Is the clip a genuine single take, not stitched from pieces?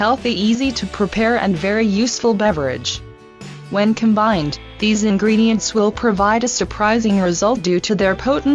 yes; 0 cuts

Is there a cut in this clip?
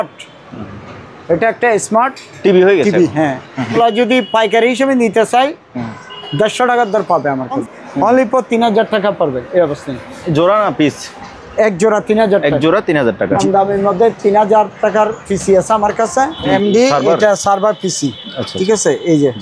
yes; 4 cuts; at 3.8 s, 7.6 s, 13.4 s, 16.5 s

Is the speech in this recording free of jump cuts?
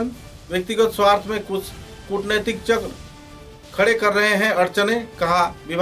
yes; 0 cuts

